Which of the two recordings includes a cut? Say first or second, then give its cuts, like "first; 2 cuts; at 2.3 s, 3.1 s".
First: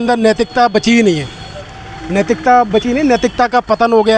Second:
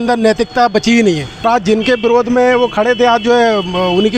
second; 1 cut; at 1.4 s